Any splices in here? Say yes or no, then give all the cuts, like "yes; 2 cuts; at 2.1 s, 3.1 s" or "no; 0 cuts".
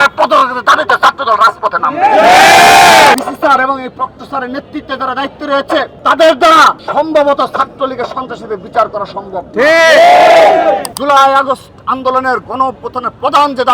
yes; 4 cuts; at 3.1 s, 5.9 s, 6.8 s, 10.9 s